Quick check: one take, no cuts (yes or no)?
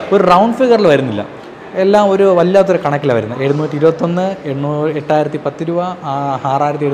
yes